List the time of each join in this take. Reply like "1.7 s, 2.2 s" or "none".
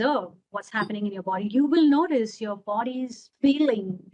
3.2 s